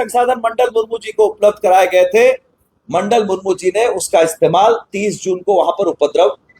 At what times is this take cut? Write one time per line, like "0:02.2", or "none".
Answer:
none